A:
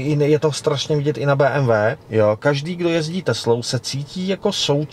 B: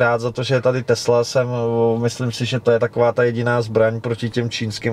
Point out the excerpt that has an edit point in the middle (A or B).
A